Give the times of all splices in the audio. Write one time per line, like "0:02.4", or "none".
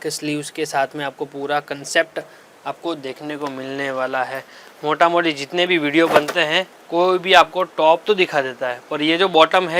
none